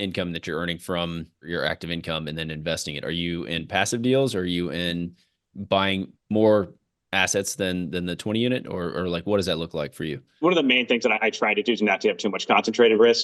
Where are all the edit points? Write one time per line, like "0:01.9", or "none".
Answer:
0:01.4
0:10.4